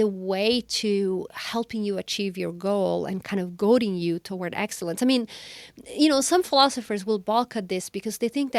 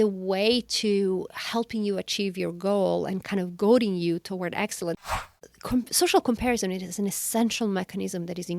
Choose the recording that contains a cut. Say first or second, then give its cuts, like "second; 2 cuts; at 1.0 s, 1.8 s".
second; 1 cut; at 5.0 s